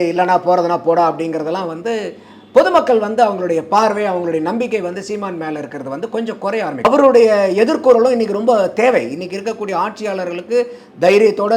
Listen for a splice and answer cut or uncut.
cut